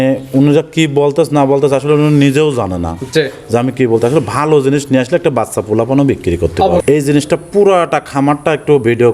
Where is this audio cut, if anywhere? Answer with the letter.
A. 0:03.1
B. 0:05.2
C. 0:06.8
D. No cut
C